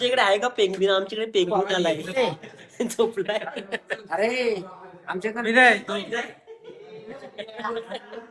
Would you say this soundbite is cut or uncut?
uncut